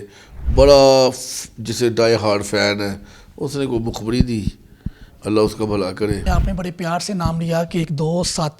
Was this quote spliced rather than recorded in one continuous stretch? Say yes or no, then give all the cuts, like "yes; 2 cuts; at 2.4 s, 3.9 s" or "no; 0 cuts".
yes; 1 cut; at 6.2 s